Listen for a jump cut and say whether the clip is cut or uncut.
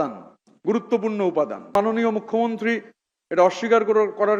cut